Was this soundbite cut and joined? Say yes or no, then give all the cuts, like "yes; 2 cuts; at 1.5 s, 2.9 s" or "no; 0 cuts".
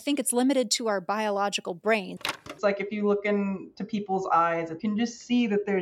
yes; 2 cuts; at 2.5 s, 4.7 s